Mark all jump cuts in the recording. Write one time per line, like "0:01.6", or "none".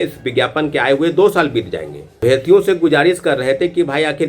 0:02.2